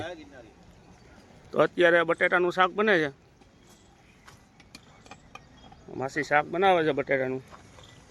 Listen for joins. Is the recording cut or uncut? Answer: uncut